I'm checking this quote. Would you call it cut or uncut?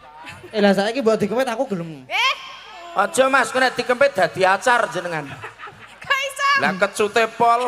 uncut